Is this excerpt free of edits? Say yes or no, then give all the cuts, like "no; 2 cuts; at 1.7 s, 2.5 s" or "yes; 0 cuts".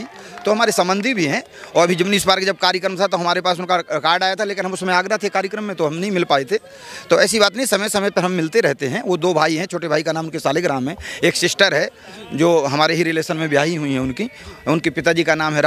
yes; 0 cuts